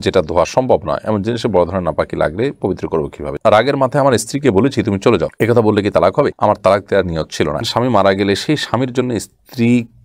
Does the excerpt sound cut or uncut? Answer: cut